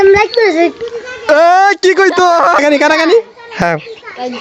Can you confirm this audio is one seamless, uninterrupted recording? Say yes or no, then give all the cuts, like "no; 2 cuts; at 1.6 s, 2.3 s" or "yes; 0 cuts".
no; 1 cut; at 2.6 s